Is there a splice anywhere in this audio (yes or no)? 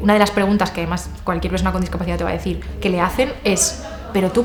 no